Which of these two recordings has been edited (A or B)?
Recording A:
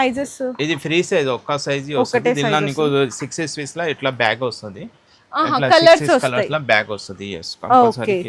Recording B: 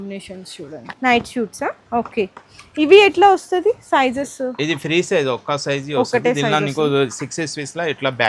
B